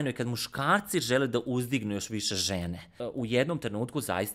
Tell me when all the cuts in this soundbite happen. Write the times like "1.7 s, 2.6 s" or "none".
2.9 s